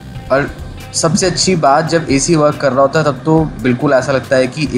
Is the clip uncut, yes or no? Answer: yes